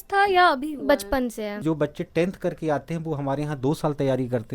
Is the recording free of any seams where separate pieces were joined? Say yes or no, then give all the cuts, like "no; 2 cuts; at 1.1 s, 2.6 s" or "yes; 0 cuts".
no; 1 cut; at 1.6 s